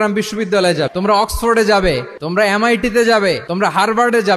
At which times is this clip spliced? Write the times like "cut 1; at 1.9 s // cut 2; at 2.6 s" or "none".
cut 1; at 0.9 s // cut 2; at 2.1 s // cut 3; at 3.5 s